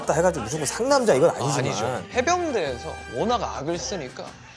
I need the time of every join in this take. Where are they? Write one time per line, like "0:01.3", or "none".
0:02.0